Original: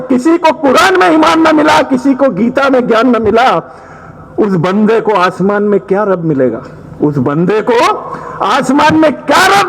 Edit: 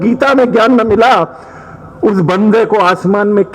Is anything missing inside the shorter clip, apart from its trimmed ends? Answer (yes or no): no